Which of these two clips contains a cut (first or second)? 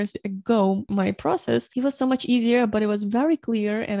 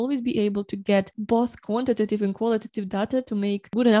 first